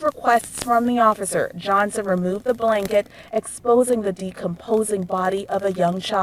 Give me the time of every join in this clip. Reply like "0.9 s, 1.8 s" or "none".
none